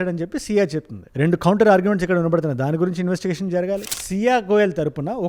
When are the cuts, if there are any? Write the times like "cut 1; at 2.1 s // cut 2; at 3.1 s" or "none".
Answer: cut 1; at 3.9 s